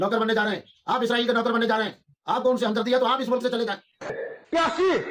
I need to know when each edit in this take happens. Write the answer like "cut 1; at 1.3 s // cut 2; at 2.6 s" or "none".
cut 1; at 4.1 s